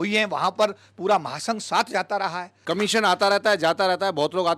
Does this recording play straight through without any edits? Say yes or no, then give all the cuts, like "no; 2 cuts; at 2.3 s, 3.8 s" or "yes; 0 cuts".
no; 1 cut; at 2.5 s